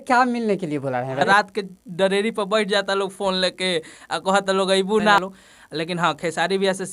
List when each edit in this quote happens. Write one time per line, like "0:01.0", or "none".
0:01.3
0:05.2